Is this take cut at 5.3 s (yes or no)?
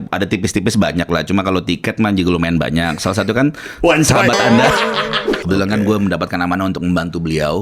yes